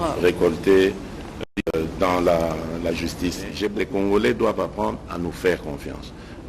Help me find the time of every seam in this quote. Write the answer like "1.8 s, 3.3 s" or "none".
3.7 s